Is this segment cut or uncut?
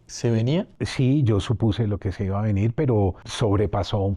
cut